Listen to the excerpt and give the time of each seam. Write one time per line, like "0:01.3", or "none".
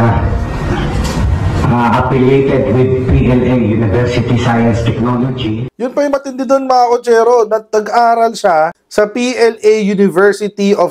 0:05.7